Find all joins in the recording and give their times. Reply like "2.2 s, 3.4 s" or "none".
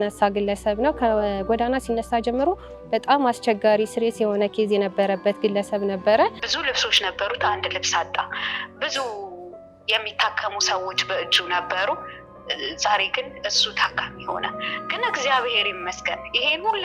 6.5 s